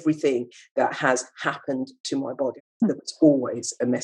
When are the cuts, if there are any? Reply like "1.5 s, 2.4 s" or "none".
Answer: 2.6 s